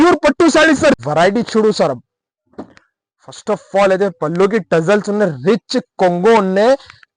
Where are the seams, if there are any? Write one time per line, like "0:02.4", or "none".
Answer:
0:01.0